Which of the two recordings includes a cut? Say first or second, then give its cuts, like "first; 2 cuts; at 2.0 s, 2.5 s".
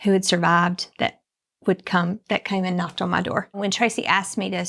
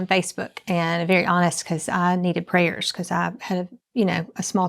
first; 1 cut; at 3.5 s